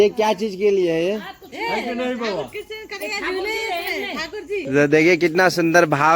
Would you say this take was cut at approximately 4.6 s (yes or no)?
yes